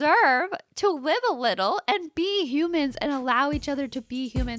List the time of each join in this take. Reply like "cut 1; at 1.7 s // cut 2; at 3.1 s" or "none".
none